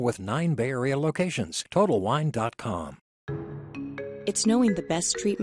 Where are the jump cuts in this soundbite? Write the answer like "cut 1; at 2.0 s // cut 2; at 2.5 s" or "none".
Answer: none